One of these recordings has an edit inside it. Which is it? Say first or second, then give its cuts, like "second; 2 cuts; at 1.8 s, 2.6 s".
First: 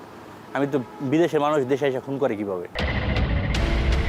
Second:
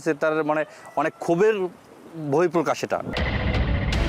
second; 1 cut; at 3.1 s